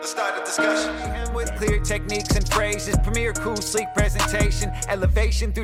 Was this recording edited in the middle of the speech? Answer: no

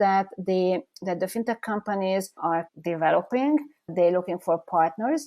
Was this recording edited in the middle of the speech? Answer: no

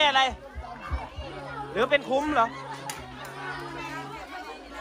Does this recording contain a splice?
no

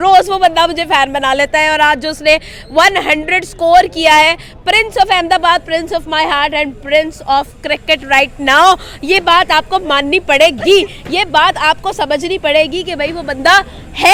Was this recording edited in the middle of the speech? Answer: no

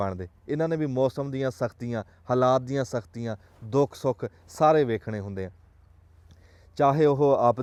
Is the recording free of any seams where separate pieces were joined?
yes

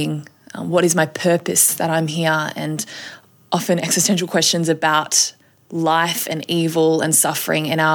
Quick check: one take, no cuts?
yes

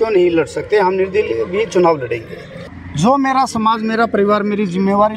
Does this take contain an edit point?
yes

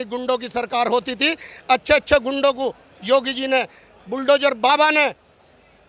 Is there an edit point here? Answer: no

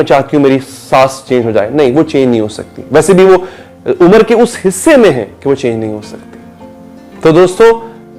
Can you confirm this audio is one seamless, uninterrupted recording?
yes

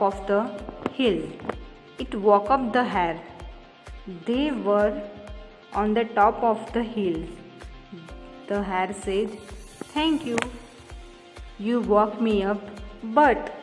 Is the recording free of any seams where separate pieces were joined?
yes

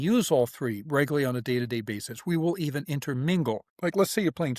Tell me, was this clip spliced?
yes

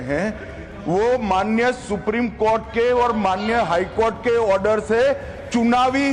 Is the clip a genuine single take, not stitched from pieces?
yes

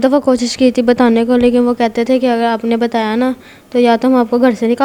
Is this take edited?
no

